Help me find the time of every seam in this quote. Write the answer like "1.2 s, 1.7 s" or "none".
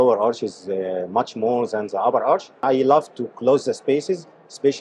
2.6 s